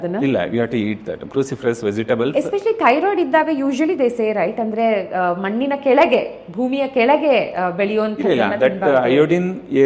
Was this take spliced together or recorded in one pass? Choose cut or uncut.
uncut